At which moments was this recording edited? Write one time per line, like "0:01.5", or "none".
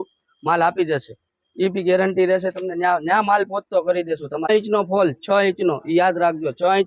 0:04.5